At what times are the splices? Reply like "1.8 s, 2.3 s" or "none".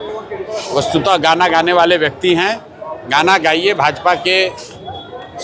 none